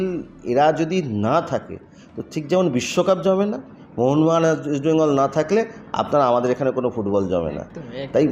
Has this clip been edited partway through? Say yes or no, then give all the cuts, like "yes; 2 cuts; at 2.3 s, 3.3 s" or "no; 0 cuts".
no; 0 cuts